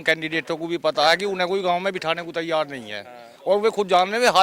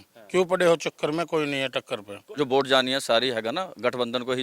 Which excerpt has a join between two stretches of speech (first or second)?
second